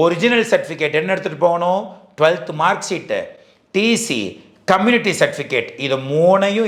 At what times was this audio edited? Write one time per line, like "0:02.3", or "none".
none